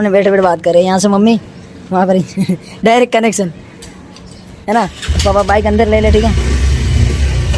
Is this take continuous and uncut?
yes; 0 cuts

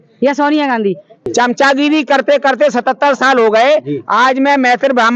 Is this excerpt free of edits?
no; 1 cut; at 1.2 s

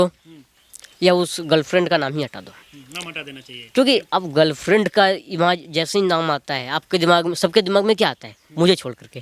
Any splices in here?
no; 0 cuts

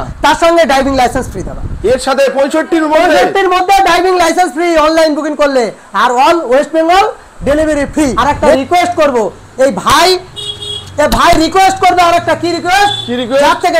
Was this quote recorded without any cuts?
no; 1 cut; at 8.1 s

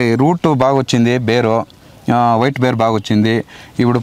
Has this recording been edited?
no; 0 cuts

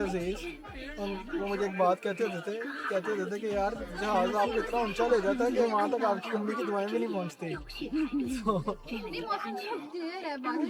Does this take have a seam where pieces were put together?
no; 0 cuts

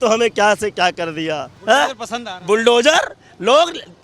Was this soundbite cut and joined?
yes; 1 cut; at 1.5 s

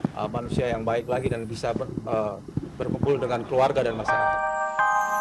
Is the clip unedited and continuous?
no; 1 cut; at 4.0 s

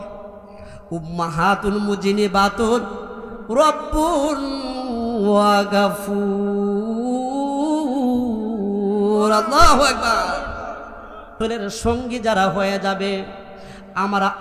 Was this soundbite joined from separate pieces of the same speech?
yes; 1 cut; at 11.4 s

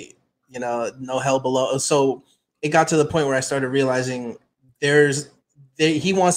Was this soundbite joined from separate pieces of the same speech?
no; 0 cuts

